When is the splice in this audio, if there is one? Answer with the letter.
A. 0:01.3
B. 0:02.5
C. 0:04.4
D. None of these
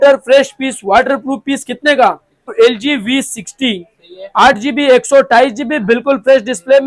B